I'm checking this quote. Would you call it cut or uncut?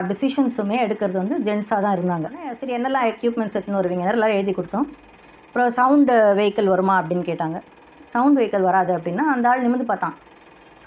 cut